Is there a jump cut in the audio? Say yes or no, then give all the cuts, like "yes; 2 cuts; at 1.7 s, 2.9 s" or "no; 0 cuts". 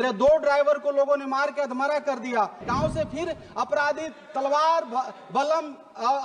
yes; 1 cut; at 2.6 s